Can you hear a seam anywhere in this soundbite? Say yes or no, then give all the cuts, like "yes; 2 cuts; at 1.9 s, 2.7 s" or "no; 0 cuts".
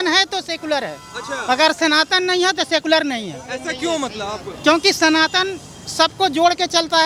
no; 0 cuts